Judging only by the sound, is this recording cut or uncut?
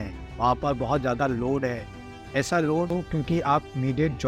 cut